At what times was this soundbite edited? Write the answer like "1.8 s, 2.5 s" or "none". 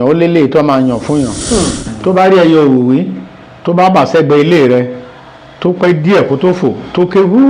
1.4 s